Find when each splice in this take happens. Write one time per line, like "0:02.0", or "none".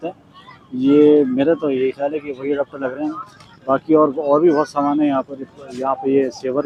none